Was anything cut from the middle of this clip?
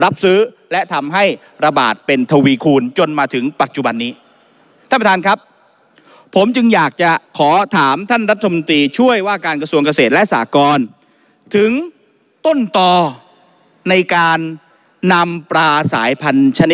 no; 0 cuts

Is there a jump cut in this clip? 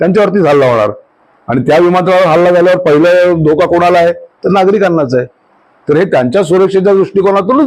no; 0 cuts

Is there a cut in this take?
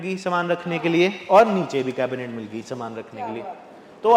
no; 0 cuts

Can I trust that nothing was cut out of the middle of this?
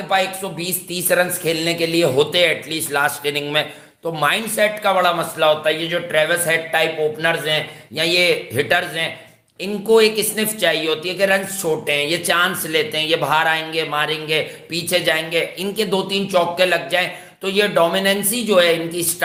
yes; 0 cuts

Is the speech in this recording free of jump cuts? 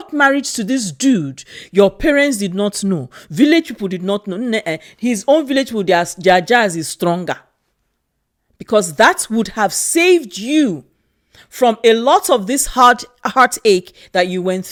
yes; 0 cuts

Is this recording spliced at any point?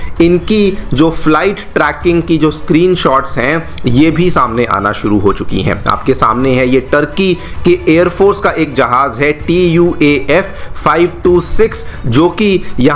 no; 0 cuts

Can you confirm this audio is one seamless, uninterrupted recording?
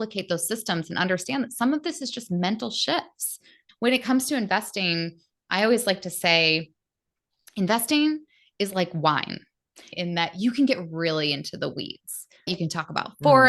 no; 3 cuts; at 3.6 s, 9.9 s, 12.5 s

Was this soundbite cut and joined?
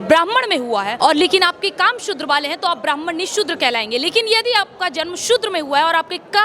yes; 1 cut; at 0.9 s

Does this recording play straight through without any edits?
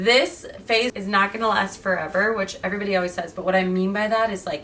no; 1 cut; at 0.9 s

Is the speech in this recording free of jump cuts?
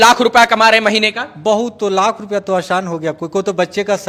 yes; 0 cuts

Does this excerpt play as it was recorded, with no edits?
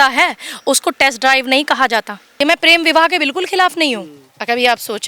no; 1 cut; at 2.4 s

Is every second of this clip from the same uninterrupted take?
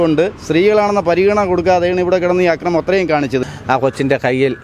no; 1 cut; at 3.4 s

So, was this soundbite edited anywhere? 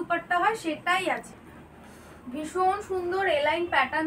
yes; 1 cut; at 1.4 s

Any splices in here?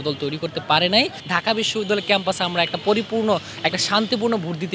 no; 0 cuts

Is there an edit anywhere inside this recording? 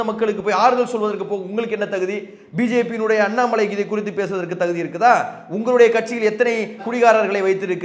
no; 0 cuts

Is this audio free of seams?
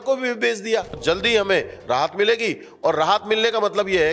no; 1 cut; at 1.0 s

